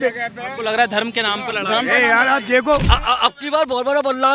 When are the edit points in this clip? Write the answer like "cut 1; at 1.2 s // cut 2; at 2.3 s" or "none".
cut 1; at 2.9 s